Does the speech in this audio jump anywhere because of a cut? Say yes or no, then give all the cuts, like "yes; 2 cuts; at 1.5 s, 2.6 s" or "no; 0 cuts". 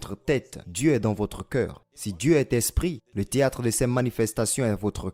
no; 0 cuts